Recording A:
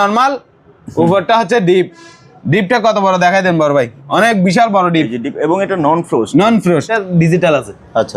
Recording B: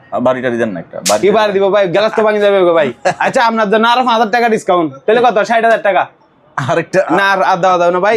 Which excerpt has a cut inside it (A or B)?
A